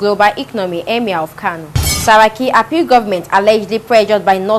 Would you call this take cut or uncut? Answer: uncut